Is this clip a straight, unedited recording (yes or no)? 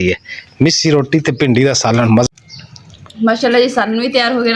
no